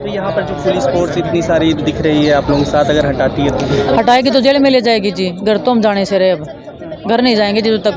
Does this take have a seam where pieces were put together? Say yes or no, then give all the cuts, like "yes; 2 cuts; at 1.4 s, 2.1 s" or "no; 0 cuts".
no; 0 cuts